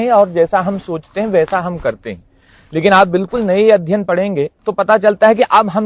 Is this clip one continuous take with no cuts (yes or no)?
yes